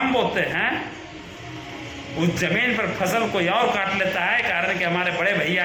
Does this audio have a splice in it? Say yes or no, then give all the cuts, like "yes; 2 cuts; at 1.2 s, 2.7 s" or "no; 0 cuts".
no; 0 cuts